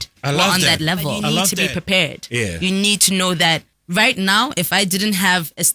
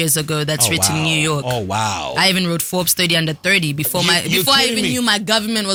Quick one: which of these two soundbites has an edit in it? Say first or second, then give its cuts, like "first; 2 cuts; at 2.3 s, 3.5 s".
first; 2 cuts; at 1.5 s, 3.7 s